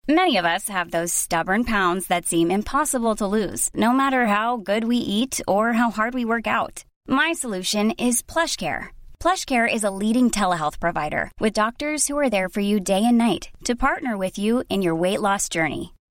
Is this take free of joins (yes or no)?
yes